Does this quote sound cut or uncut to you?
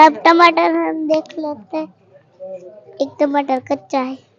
uncut